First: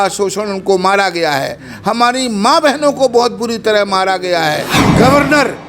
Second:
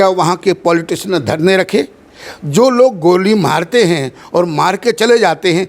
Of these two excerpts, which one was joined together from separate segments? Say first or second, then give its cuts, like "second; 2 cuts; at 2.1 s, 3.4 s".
first; 1 cut; at 4.8 s